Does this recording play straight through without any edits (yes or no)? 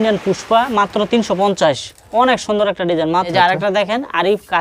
no